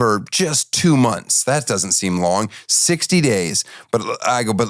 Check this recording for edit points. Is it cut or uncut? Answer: uncut